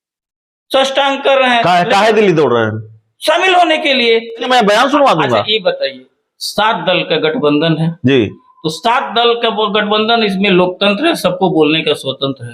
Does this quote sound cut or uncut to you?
cut